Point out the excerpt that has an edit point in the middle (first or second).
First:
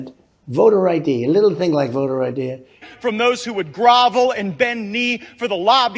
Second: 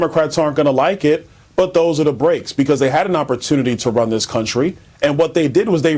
first